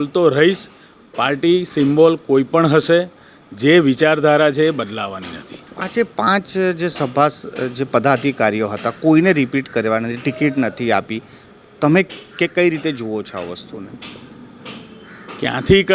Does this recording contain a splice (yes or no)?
no